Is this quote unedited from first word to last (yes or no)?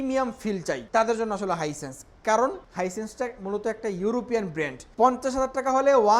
no